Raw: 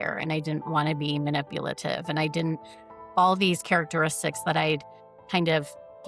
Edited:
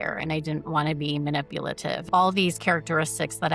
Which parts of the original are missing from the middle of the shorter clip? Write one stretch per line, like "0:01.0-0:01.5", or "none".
0:02.0-0:03.1